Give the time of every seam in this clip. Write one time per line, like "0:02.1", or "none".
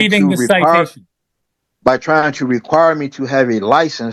none